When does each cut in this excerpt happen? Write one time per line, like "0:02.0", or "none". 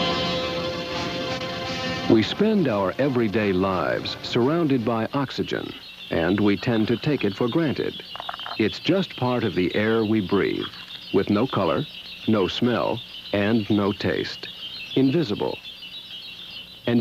0:12.1